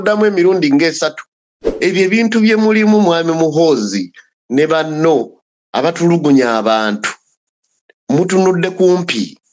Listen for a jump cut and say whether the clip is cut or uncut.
cut